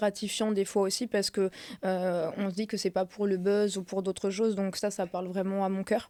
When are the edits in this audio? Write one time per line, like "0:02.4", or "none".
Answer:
none